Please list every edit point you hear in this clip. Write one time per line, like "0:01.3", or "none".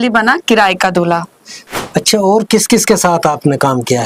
0:01.6